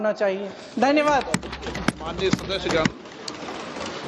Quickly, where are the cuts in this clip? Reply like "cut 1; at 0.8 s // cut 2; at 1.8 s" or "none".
cut 1; at 2.4 s